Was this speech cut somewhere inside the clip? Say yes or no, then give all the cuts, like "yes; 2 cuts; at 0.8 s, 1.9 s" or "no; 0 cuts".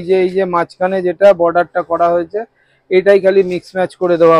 no; 0 cuts